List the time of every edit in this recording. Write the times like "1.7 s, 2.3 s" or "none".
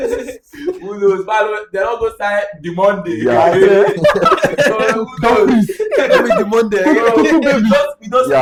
none

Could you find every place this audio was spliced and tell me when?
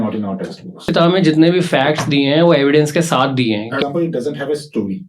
0.9 s, 3.8 s

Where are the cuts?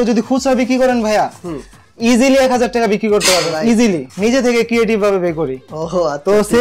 4.1 s

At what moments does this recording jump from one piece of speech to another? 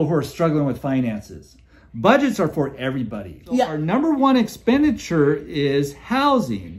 3.8 s

